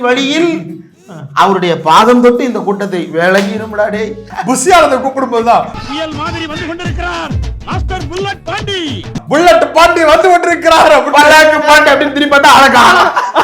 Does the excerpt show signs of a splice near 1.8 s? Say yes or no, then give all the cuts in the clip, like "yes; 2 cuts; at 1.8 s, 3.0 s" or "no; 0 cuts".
no; 2 cuts; at 4.3 s, 9.2 s